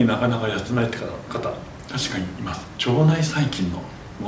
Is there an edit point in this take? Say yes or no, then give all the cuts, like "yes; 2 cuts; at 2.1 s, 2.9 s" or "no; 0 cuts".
yes; 1 cut; at 2.7 s